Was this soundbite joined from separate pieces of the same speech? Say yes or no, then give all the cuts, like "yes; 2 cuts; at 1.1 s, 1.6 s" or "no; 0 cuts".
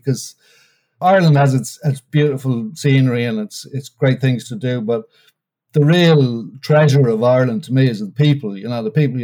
yes; 2 cuts; at 1.0 s, 2.1 s